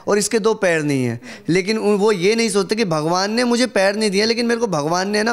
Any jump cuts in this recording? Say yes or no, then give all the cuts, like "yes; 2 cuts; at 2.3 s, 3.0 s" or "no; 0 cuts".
no; 0 cuts